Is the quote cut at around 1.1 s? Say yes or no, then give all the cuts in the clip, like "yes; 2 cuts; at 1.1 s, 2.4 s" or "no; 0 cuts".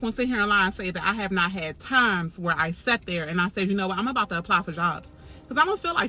no; 0 cuts